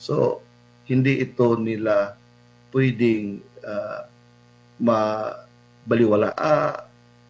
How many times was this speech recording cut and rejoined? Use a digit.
1